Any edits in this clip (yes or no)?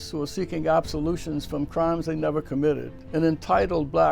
yes